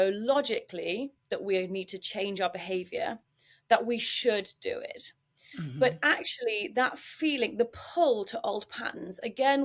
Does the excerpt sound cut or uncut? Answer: uncut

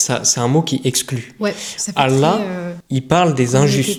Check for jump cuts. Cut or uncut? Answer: uncut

